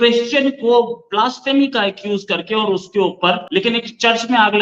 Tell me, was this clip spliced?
yes; 1 cut; at 3.4 s

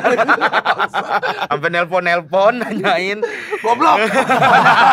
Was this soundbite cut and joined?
yes; 1 cut; at 1.4 s

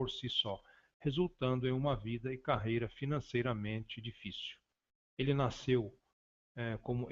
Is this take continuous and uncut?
yes; 0 cuts

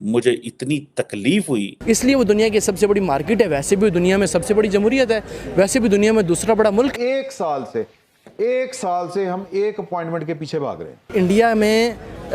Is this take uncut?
no; 3 cuts; at 1.7 s, 7.0 s, 11.1 s

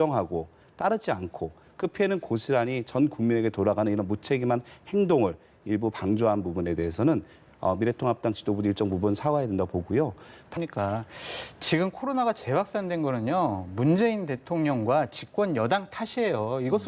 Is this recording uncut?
no; 1 cut; at 10.6 s

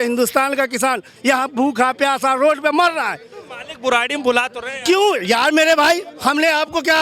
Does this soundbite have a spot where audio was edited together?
no; 0 cuts

